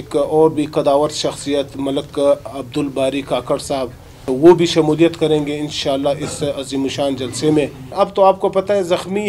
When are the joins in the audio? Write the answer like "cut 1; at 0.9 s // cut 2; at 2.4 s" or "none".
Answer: cut 1; at 4.2 s // cut 2; at 7.9 s